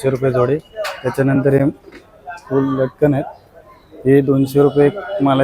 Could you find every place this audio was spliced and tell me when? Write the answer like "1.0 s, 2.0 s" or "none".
none